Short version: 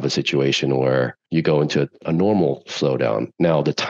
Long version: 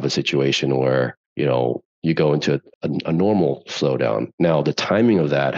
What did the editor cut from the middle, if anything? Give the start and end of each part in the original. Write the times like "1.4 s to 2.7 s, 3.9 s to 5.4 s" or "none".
1.2 s to 1.9 s, 2.7 s to 3.0 s